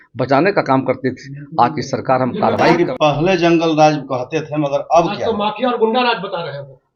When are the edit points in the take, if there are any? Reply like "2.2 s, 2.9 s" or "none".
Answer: 2.8 s